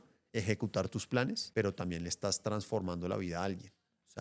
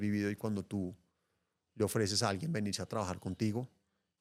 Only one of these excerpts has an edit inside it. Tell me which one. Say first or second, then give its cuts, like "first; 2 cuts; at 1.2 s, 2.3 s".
first; 1 cut; at 1.4 s